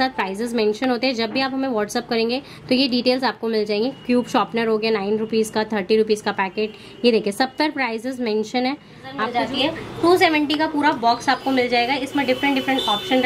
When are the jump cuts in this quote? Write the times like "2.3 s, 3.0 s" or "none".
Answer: 9.3 s